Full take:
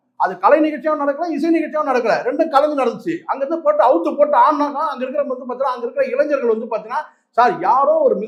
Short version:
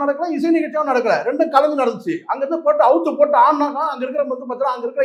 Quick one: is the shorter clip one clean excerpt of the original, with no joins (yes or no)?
yes